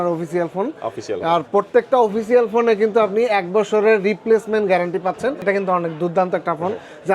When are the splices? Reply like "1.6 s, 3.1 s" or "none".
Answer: 5.4 s